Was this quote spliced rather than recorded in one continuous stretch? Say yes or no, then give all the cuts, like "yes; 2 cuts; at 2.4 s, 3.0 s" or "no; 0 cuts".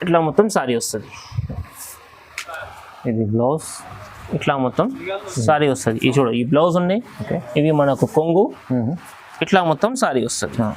yes; 1 cut; at 2.7 s